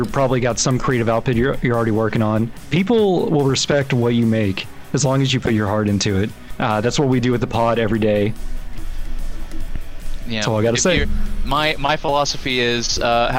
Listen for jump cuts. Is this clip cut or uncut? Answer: cut